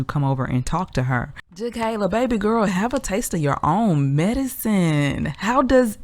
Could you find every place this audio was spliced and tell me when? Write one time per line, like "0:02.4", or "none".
0:01.7